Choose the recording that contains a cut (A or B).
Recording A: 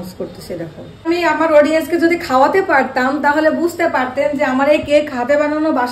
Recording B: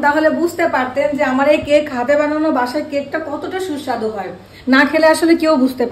A